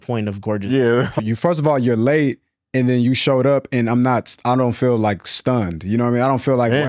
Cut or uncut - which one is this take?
cut